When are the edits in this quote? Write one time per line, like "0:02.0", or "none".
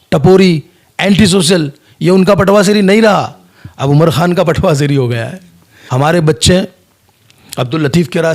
0:05.9